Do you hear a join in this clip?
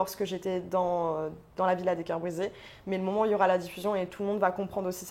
no; 0 cuts

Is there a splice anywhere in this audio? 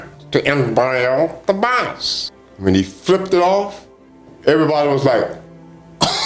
no; 0 cuts

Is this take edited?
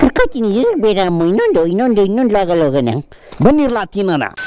no; 0 cuts

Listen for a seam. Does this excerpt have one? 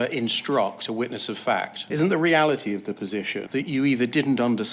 yes; 2 cuts; at 1.8 s, 3.4 s

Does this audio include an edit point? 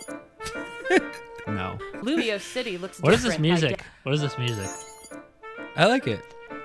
no; 0 cuts

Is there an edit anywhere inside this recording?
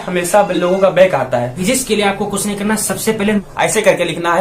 yes; 2 cuts; at 1.5 s, 3.4 s

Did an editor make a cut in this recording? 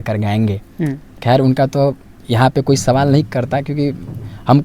no; 0 cuts

